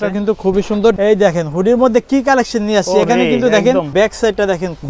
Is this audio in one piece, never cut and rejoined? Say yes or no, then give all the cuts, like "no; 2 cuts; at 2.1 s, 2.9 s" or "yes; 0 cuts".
no; 2 cuts; at 1.0 s, 3.9 s